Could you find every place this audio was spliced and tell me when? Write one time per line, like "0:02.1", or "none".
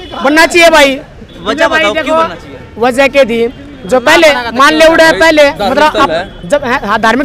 none